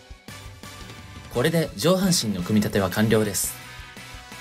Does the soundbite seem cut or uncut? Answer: cut